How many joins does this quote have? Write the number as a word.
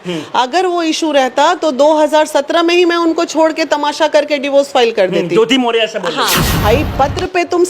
one